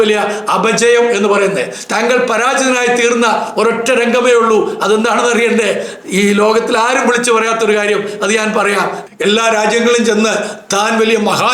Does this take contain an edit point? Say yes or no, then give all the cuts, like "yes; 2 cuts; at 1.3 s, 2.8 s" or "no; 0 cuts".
yes; 1 cut; at 9.1 s